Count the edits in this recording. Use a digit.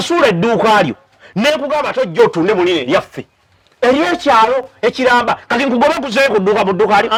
0